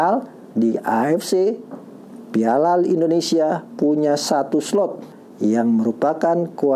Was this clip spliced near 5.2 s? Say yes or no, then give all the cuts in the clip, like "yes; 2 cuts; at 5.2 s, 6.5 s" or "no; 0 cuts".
yes; 1 cut; at 5.2 s